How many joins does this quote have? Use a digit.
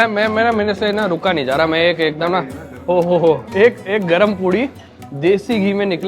1